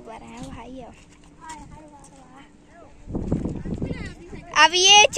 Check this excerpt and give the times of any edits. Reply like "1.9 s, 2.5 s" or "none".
none